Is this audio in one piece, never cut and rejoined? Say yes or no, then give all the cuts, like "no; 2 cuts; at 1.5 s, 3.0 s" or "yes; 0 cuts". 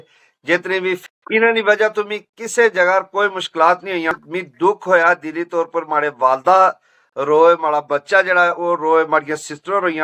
no; 2 cuts; at 1.0 s, 4.1 s